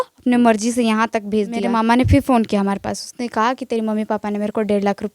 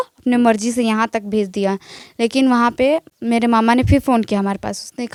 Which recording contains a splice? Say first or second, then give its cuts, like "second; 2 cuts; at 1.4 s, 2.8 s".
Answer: first; 1 cut; at 1.6 s